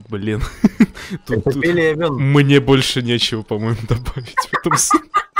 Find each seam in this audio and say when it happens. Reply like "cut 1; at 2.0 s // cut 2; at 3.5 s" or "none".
none